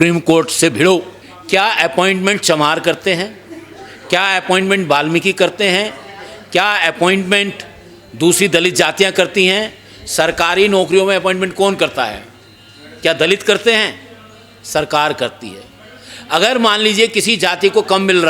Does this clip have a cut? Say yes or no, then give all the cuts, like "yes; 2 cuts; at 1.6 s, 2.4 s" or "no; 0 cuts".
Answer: no; 0 cuts